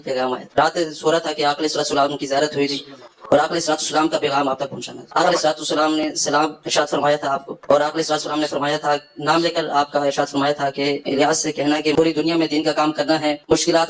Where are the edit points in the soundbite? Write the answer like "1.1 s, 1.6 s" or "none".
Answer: none